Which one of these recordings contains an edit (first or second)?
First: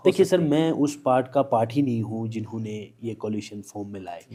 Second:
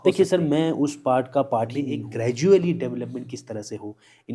second